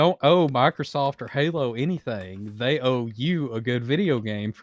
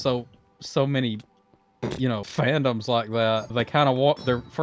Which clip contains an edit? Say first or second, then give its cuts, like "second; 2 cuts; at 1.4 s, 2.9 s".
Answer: second; 2 cuts; at 2.3 s, 3.5 s